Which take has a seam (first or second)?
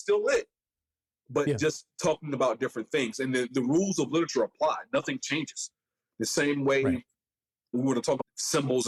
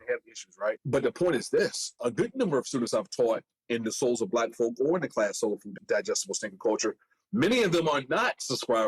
second